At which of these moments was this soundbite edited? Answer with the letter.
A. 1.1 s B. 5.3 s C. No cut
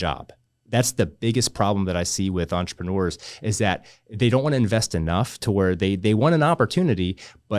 C